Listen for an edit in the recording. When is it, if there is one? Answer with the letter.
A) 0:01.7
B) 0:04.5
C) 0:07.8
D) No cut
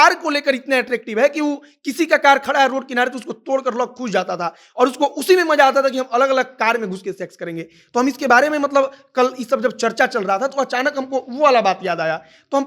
D